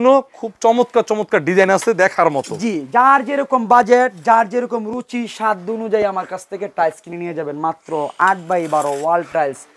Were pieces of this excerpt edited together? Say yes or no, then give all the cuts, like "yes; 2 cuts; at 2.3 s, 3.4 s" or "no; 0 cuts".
no; 0 cuts